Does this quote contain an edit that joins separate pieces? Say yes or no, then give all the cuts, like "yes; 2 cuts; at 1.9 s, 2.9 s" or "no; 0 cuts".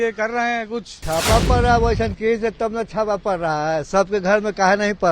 yes; 1 cut; at 0.9 s